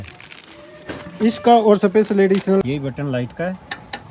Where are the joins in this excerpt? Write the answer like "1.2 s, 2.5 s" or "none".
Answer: 2.6 s